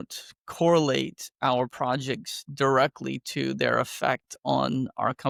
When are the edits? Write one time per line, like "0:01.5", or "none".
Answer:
none